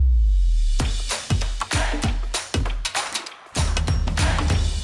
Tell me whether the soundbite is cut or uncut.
cut